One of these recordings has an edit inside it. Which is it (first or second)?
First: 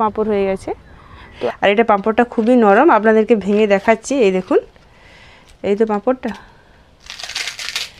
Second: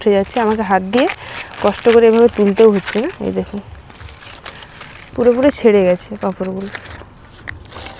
first